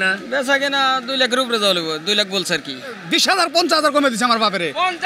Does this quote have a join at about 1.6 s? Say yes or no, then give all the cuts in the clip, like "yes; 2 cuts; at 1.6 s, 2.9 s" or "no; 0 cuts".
no; 1 cut; at 3.0 s